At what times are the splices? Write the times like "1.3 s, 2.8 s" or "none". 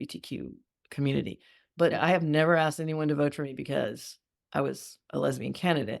1.9 s